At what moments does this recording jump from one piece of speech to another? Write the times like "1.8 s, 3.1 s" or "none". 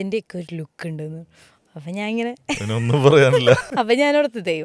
3.7 s